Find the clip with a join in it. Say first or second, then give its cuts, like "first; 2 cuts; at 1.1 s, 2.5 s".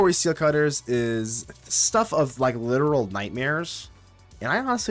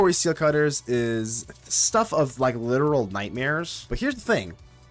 second; 1 cut; at 3.8 s